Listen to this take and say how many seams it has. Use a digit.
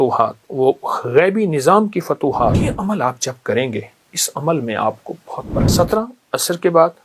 2